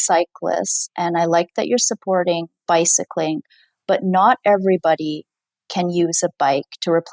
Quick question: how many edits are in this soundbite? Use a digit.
0